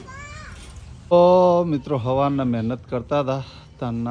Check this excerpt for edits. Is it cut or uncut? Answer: cut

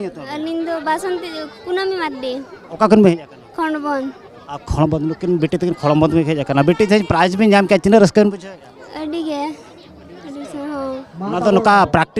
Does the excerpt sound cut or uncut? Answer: uncut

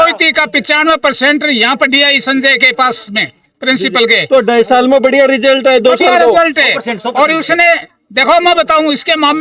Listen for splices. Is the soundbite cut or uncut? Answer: uncut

